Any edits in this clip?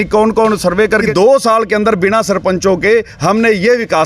yes; 1 cut; at 1.1 s

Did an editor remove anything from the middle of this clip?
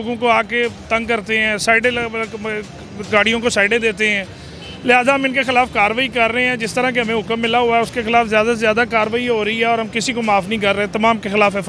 no; 0 cuts

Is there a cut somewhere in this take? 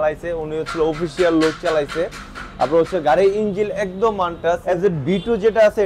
yes; 1 cut; at 4.6 s

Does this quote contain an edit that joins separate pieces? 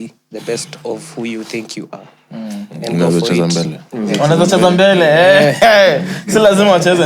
no; 0 cuts

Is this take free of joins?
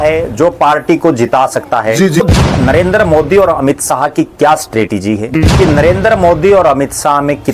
no; 2 cuts; at 2.2 s, 5.3 s

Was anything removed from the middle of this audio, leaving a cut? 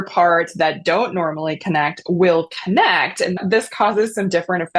yes; 1 cut; at 3.4 s

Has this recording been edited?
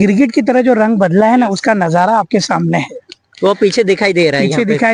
no; 0 cuts

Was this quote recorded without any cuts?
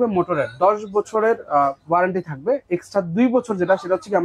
yes; 0 cuts

